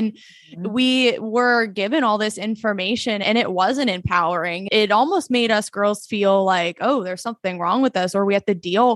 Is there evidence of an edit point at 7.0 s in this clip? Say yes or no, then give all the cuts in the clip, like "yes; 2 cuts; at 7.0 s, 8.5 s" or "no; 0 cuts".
no; 2 cuts; at 3.2 s, 4.7 s